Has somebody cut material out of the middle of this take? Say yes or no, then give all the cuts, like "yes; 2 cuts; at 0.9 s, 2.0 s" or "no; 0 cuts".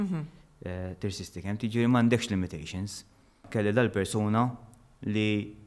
yes; 1 cut; at 3.4 s